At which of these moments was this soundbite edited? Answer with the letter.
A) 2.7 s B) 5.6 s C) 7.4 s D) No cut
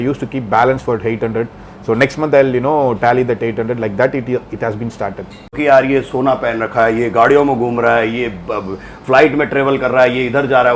B